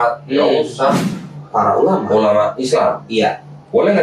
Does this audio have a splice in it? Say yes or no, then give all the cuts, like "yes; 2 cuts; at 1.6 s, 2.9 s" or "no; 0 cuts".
yes; 1 cut; at 1.1 s